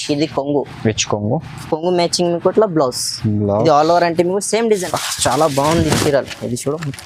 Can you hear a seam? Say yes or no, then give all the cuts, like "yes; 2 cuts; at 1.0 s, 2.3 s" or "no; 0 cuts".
yes; 1 cut; at 4.8 s